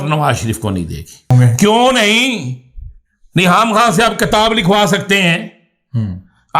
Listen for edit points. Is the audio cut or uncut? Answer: cut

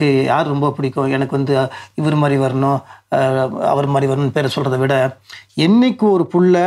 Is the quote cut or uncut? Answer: uncut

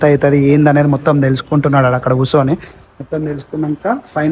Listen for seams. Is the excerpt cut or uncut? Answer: uncut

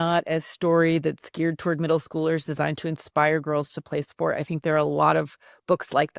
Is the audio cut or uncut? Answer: uncut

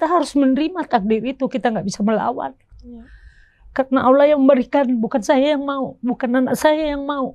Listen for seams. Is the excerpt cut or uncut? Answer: uncut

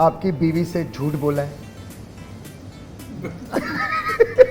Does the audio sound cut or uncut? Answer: cut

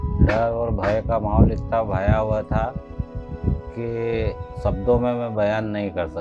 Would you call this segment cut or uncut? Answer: uncut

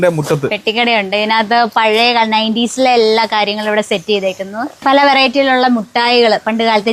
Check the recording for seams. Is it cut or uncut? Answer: uncut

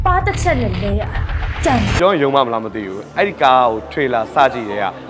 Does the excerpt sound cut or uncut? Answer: cut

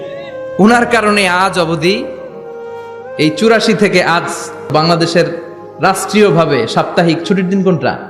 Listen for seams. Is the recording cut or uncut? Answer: cut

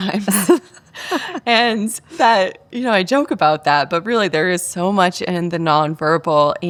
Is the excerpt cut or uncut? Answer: uncut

